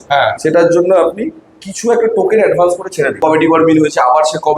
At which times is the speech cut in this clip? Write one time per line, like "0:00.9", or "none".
0:03.2